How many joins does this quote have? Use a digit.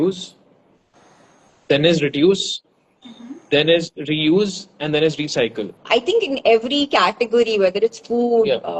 1